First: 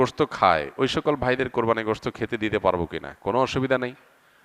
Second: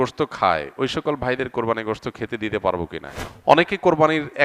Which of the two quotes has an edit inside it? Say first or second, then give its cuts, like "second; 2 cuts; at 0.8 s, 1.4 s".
second; 1 cut; at 3.1 s